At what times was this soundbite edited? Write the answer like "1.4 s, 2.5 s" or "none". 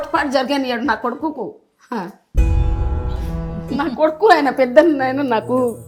none